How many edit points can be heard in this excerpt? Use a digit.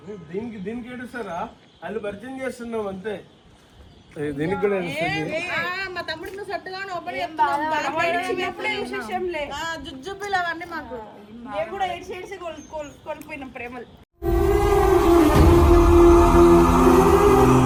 0